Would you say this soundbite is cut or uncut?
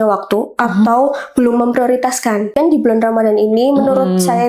cut